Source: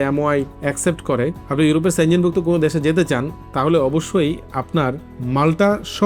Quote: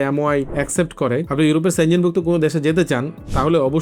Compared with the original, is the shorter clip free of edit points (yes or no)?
no